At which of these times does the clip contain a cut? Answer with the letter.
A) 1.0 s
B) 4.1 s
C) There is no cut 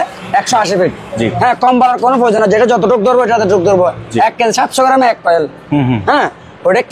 C